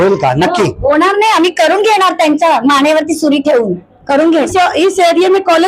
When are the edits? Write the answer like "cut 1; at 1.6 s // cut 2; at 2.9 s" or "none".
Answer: cut 1; at 4.5 s